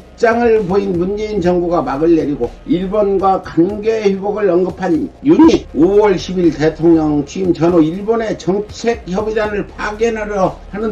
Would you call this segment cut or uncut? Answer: uncut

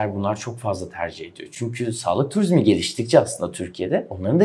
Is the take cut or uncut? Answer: uncut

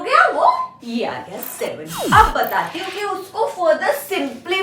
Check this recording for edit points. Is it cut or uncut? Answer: cut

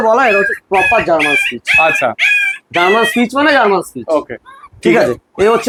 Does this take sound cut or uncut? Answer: uncut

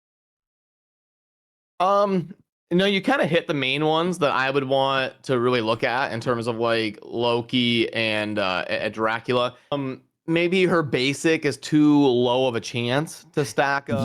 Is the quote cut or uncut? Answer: cut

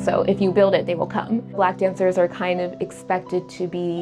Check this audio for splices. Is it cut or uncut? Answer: cut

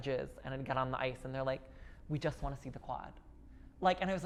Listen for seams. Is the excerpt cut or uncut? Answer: uncut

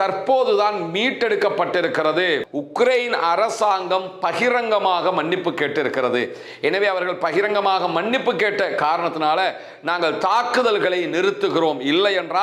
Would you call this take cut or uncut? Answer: cut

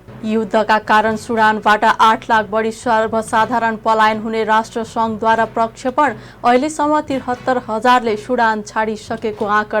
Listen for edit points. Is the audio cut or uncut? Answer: uncut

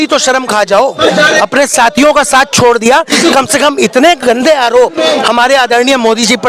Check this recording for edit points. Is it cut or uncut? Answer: uncut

